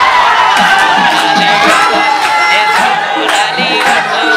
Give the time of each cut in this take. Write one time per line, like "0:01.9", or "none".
none